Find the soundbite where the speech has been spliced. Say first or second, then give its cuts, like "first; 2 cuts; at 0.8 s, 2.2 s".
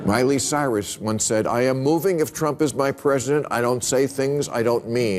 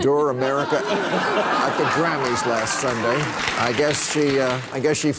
second; 1 cut; at 3.5 s